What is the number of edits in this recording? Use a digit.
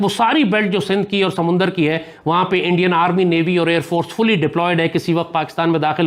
0